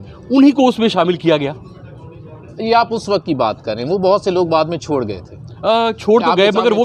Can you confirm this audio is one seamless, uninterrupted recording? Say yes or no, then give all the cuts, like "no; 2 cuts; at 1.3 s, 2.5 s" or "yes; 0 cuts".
yes; 0 cuts